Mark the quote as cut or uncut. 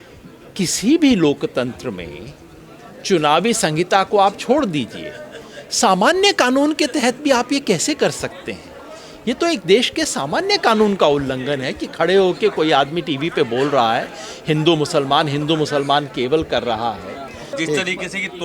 cut